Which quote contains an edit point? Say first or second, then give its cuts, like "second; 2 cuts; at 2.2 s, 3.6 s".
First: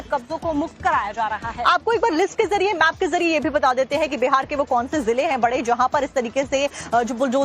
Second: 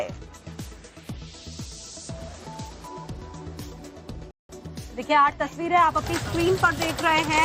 first; 1 cut; at 2.1 s